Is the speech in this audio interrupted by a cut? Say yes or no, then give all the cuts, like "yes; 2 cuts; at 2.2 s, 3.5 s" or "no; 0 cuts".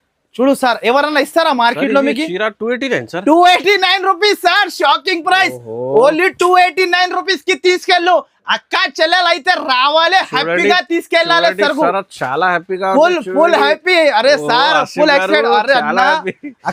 no; 0 cuts